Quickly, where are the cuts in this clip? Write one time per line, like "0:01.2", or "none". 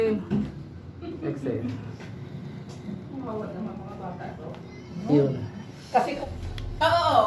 0:06.2